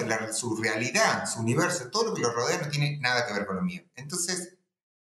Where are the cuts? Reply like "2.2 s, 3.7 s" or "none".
none